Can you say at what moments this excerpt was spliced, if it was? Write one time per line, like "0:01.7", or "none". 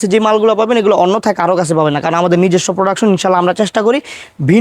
none